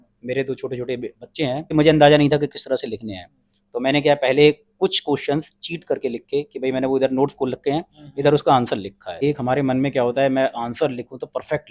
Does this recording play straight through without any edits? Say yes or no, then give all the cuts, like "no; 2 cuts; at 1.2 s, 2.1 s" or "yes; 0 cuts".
no; 2 cuts; at 1.7 s, 9.2 s